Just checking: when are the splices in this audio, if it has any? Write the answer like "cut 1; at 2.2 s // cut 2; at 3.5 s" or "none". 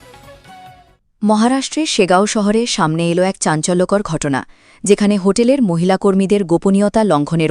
cut 1; at 1.0 s